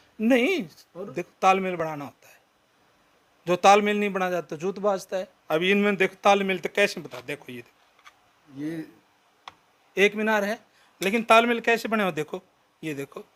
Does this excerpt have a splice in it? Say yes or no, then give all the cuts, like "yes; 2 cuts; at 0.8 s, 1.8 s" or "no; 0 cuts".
no; 0 cuts